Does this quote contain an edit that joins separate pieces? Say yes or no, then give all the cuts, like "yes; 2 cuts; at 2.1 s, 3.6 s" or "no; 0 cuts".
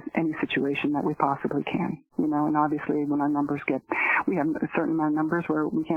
no; 0 cuts